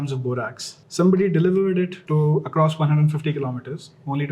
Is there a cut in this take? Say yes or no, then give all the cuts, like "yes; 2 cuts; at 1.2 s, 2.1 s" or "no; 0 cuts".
no; 0 cuts